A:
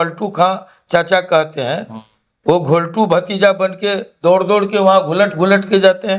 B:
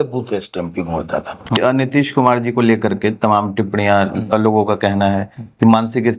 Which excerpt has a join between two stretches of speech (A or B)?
B